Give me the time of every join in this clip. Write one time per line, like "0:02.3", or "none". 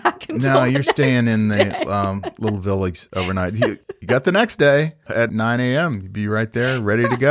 0:03.8
0:05.3